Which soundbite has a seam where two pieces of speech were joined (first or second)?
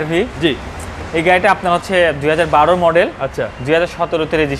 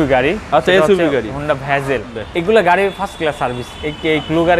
second